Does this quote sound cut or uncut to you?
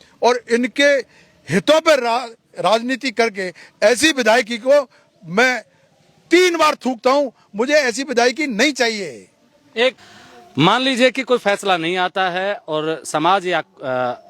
cut